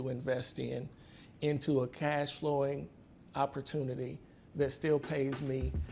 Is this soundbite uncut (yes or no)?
yes